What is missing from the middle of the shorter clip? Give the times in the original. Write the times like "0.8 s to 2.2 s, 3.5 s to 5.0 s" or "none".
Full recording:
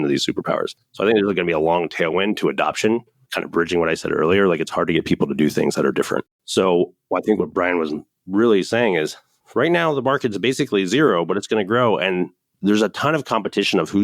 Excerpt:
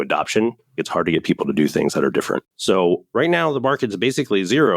3.3 s to 4.6 s, 6.5 s to 9.1 s